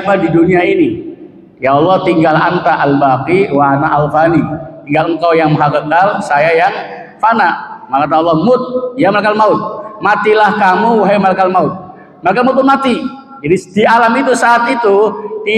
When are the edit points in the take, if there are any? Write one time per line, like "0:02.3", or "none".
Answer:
none